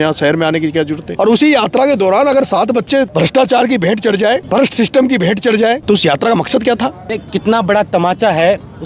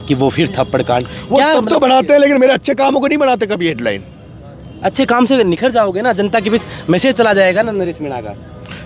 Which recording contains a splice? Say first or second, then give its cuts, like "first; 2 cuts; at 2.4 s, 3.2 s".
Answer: first; 5 cuts; at 1.0 s, 3.1 s, 4.4 s, 5.8 s, 7.1 s